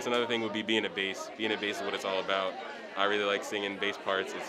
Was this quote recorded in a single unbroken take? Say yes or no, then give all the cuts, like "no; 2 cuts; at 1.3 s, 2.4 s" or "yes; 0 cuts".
yes; 0 cuts